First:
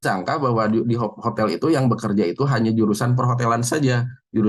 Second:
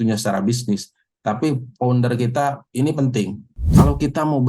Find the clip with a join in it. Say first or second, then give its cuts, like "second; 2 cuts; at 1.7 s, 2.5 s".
second; 1 cut; at 3.6 s